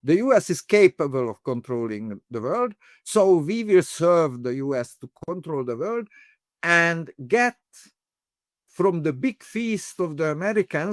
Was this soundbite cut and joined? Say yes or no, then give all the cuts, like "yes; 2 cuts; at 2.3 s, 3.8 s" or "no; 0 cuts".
no; 0 cuts